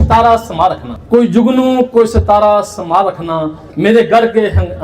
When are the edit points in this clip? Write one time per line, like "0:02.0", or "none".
0:00.9